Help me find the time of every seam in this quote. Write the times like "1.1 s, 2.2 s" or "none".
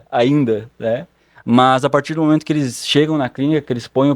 none